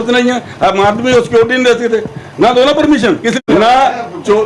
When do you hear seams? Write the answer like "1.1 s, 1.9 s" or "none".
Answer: 3.4 s